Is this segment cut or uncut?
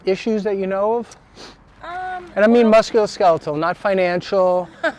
uncut